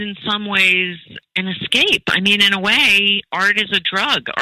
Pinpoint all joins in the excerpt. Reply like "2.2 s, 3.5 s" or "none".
1.1 s